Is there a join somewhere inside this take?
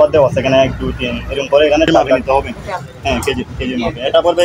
yes; 1 cut; at 2.2 s

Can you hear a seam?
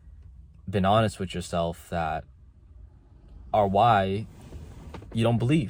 no; 0 cuts

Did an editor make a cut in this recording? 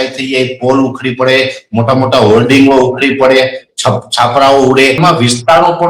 yes; 1 cut; at 5.0 s

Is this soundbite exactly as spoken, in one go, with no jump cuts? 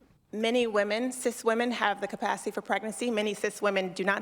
no; 2 cuts; at 1.4 s, 2.9 s

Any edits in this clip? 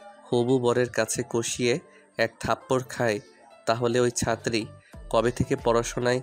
no; 0 cuts

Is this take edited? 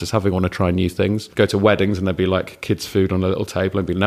yes; 1 cut; at 1.3 s

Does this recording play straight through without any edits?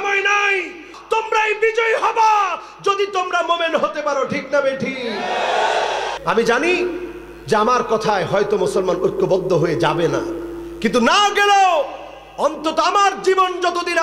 no; 2 cuts; at 0.9 s, 6.1 s

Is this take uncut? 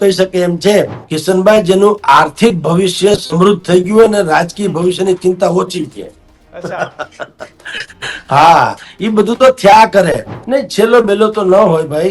no; 2 cuts; at 1.0 s, 10.3 s

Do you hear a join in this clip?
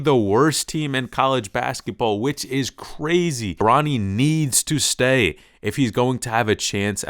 yes; 1 cut; at 3.5 s

